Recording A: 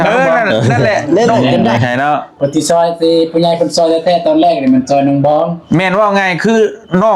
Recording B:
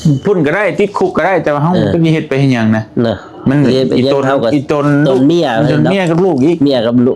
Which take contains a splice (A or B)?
A